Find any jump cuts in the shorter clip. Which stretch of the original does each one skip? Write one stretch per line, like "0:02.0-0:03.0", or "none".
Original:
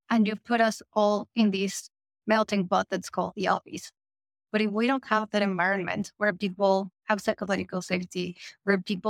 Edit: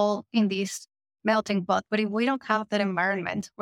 0:02.9-0:04.5